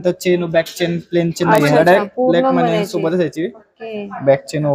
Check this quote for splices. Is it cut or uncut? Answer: uncut